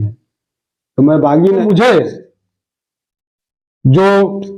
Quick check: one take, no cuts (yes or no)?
no